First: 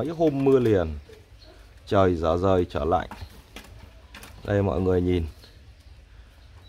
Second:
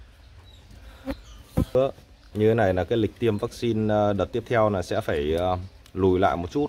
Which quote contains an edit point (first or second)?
second